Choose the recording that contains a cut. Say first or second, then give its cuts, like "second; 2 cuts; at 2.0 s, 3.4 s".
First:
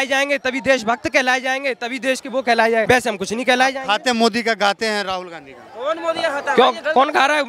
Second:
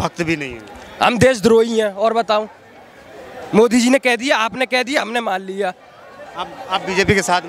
first; 1 cut; at 2.9 s